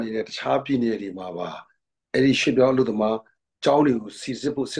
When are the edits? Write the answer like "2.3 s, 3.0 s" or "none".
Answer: none